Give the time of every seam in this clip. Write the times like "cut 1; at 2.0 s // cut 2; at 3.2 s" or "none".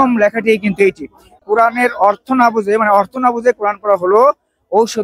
cut 1; at 1.4 s